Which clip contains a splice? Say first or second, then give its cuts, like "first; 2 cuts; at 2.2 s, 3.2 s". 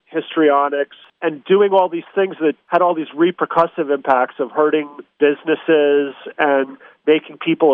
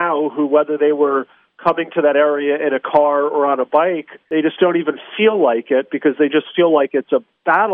first; 2 cuts; at 1.1 s, 5.0 s